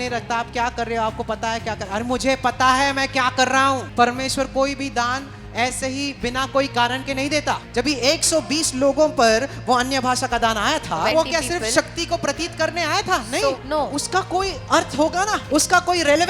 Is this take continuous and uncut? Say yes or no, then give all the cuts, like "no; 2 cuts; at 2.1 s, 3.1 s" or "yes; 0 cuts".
no; 5 cuts; at 3.9 s, 7.6 s, 11.1 s, 13.6 s, 15.4 s